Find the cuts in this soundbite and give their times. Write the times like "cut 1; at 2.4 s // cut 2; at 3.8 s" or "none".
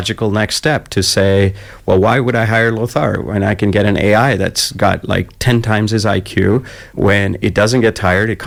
none